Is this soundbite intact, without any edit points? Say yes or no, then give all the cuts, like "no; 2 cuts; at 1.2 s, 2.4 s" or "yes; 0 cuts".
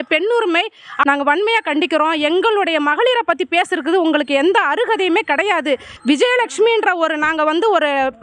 no; 2 cuts; at 0.9 s, 5.9 s